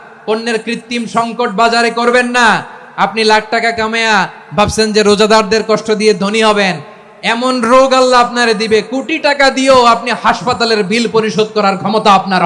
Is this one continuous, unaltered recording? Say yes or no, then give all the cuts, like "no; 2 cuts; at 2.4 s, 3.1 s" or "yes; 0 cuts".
yes; 0 cuts